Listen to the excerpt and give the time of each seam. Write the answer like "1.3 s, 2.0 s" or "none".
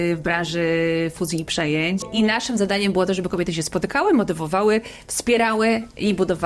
2.1 s